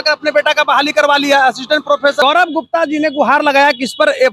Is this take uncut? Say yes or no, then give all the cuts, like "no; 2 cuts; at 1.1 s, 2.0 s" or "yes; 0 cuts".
no; 1 cut; at 2.2 s